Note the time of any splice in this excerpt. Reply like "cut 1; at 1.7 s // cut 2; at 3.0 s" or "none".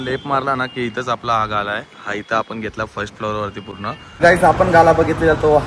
cut 1; at 4.2 s